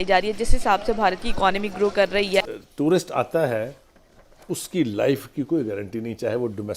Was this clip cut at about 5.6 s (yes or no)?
no